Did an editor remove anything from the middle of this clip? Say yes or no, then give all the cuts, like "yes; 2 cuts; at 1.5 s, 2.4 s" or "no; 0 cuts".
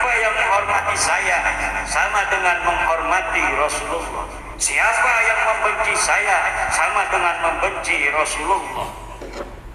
no; 0 cuts